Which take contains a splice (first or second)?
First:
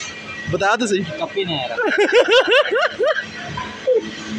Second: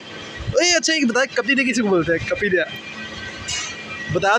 first